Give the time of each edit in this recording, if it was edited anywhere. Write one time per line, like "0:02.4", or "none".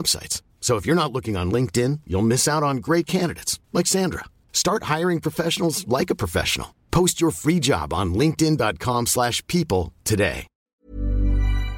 0:10.7